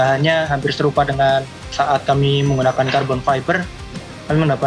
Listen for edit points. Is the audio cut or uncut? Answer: cut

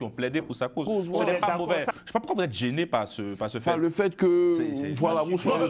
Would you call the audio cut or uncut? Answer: cut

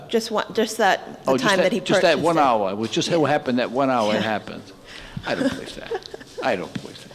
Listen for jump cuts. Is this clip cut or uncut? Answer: uncut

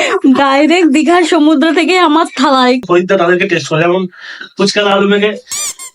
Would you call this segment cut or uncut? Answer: cut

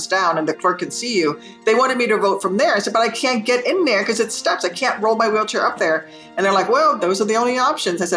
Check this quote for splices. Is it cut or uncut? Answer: uncut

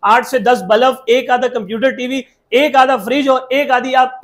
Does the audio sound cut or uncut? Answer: uncut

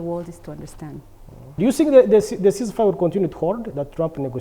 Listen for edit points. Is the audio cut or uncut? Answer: cut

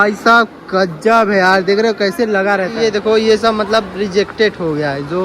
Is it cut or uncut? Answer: cut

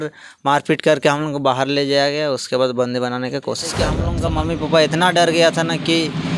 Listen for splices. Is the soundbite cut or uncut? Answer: cut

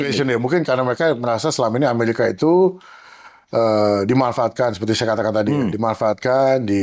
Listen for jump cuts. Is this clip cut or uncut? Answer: uncut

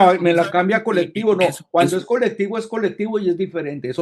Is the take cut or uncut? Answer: uncut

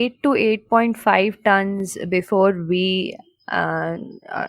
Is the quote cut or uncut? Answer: uncut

